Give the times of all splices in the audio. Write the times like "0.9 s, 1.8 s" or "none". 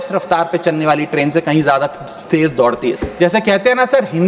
3.1 s